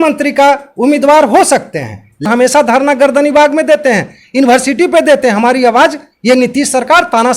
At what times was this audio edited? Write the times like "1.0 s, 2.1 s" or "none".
2.2 s